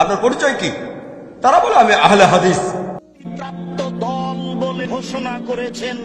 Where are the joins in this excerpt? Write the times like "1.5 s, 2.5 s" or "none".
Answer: 3.3 s, 4.8 s